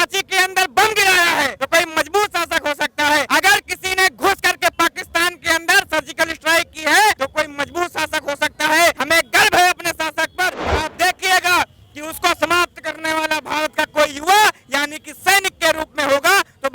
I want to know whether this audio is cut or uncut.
cut